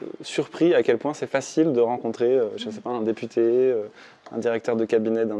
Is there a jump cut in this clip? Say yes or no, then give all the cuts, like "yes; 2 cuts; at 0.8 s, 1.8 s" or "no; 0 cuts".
no; 0 cuts